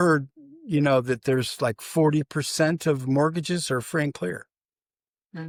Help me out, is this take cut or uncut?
uncut